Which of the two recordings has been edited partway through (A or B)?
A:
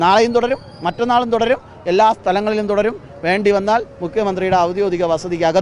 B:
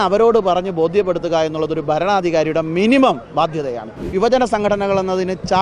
B